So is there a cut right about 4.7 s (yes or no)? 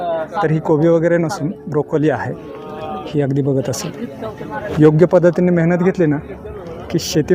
yes